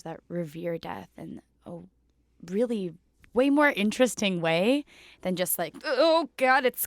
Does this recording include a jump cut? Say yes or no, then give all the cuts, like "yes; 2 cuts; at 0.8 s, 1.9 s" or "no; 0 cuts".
no; 0 cuts